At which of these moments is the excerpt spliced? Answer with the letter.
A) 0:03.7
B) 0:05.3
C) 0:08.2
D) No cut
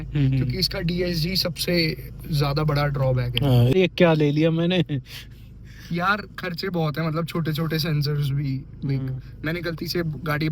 A